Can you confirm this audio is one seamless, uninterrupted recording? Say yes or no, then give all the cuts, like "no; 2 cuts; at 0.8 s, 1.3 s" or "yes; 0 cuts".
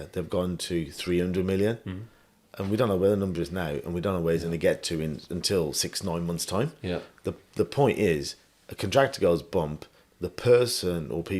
yes; 0 cuts